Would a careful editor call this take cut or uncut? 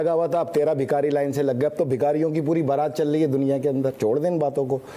uncut